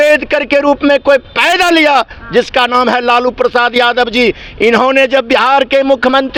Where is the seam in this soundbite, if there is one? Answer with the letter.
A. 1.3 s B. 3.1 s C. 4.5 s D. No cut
D